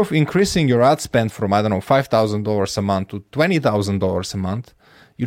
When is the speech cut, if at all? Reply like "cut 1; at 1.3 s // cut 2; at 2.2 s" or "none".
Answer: none